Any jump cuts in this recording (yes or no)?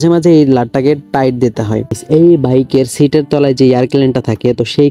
yes